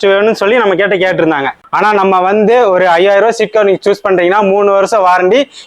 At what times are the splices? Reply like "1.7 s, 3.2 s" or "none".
1.6 s

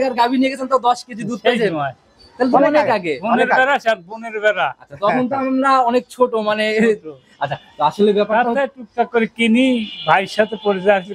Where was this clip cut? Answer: none

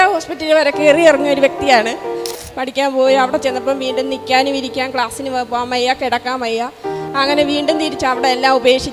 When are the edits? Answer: 2.4 s

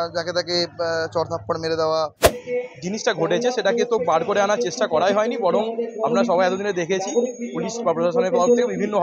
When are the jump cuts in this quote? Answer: 2.3 s

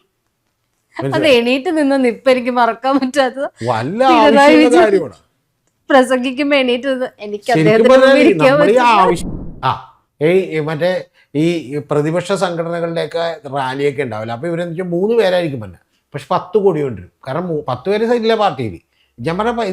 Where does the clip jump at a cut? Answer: 9.2 s

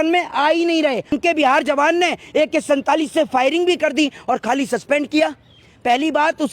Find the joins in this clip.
1.2 s

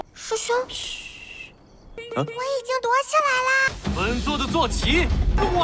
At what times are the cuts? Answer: 3.8 s

